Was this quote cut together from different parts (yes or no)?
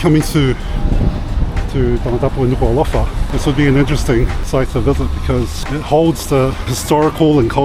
yes